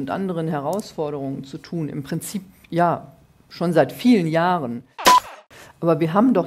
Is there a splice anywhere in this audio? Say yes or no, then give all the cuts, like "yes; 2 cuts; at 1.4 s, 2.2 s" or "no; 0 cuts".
yes; 1 cut; at 5.4 s